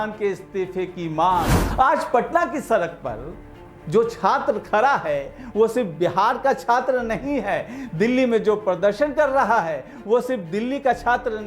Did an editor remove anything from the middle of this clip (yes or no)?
yes